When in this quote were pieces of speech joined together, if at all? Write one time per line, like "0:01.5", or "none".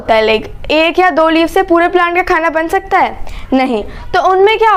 none